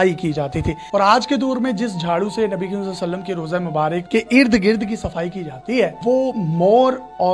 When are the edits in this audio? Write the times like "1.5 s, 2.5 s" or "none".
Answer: 0.8 s, 4.0 s, 6.0 s